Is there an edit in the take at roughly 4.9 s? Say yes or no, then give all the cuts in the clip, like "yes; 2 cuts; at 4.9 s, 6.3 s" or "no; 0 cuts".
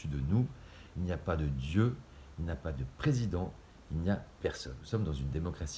yes; 1 cut; at 4.9 s